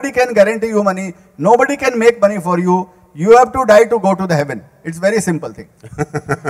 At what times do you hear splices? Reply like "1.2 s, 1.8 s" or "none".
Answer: none